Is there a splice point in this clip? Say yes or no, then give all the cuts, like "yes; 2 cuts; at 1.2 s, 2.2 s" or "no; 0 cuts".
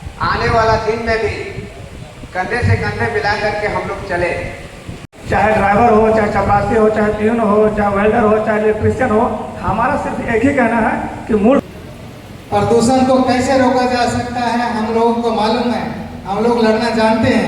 yes; 2 cuts; at 5.2 s, 11.6 s